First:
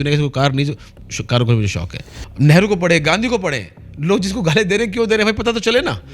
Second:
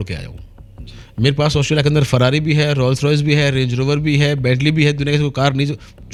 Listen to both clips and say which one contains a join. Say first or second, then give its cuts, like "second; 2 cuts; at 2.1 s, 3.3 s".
first; 1 cut; at 2.2 s